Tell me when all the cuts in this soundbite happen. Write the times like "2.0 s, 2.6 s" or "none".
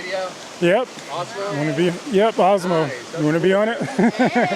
none